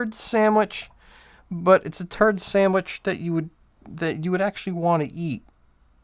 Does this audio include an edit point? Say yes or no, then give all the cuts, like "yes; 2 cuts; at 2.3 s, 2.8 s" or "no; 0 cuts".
no; 0 cuts